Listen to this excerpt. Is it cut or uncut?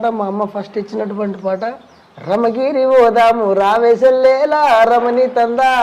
cut